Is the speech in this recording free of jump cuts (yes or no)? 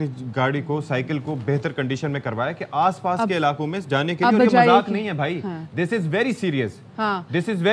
yes